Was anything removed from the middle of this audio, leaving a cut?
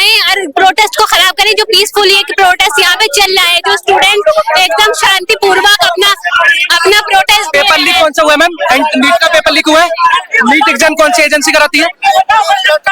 no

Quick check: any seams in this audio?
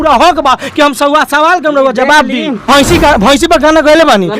yes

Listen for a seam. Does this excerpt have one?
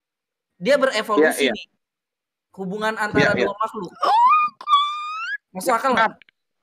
no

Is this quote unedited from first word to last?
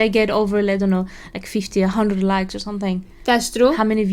yes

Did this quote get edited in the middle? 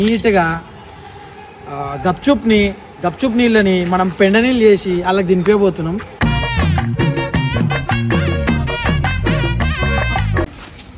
no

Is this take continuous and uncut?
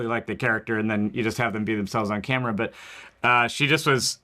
no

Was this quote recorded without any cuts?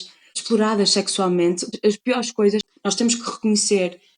no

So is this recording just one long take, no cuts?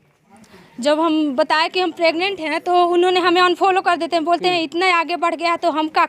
yes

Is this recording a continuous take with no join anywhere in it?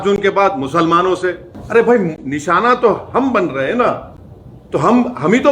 yes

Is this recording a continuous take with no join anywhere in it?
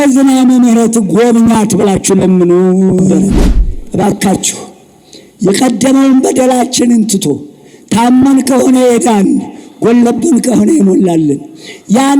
no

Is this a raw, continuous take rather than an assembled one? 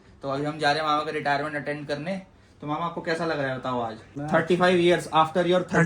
no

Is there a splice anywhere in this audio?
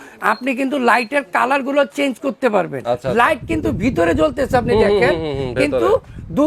yes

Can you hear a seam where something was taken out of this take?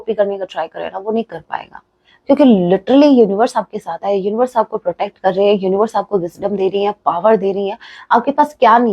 no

